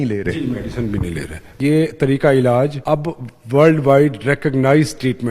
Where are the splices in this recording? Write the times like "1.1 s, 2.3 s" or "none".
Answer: 1.6 s, 2.8 s